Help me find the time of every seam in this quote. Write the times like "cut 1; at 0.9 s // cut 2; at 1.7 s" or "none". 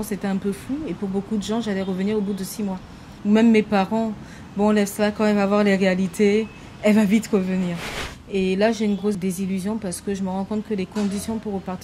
cut 1; at 3.0 s // cut 2; at 7.9 s // cut 3; at 9.2 s